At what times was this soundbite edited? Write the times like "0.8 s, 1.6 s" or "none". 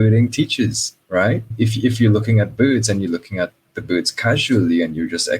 1.5 s